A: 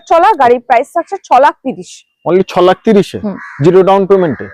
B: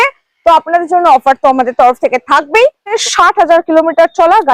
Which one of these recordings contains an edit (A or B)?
B